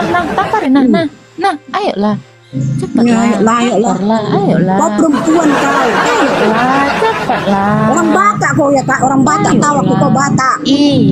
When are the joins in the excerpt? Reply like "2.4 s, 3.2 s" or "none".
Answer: none